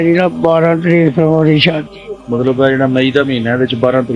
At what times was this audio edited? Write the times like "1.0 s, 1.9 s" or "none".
1.8 s